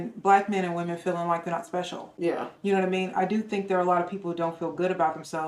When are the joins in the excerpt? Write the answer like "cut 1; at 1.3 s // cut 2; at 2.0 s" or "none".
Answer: cut 1; at 2.1 s